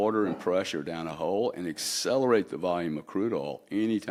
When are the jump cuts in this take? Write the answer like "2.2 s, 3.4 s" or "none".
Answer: none